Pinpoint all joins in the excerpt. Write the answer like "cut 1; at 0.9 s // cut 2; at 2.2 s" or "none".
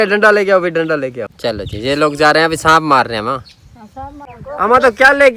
cut 1; at 1.3 s // cut 2; at 4.3 s